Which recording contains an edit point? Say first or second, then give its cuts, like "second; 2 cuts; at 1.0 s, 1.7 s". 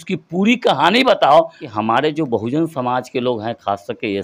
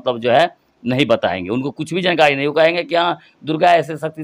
first; 1 cut; at 1.6 s